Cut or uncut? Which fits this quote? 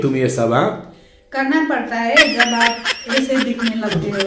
uncut